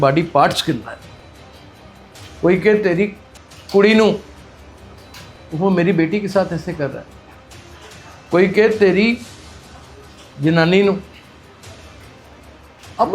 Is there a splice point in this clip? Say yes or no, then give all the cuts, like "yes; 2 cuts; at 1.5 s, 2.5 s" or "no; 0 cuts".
yes; 2 cuts; at 1.0 s, 2.4 s